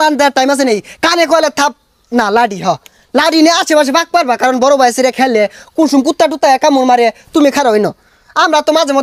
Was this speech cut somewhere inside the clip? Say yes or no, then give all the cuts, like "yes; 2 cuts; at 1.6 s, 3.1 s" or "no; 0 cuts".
no; 0 cuts